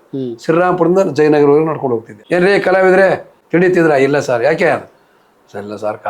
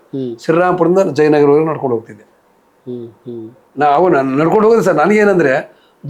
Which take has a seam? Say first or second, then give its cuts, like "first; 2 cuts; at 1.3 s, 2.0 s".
first; 2 cuts; at 2.1 s, 3.3 s